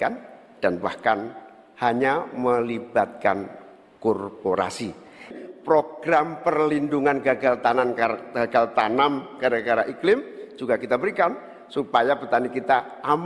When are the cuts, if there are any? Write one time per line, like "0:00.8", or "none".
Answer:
0:05.3